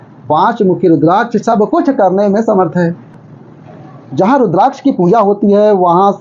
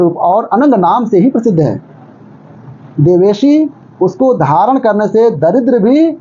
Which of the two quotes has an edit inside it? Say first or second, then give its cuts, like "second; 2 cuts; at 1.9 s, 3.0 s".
first; 1 cut; at 3.0 s